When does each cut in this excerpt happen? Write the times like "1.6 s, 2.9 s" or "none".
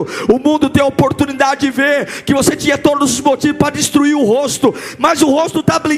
none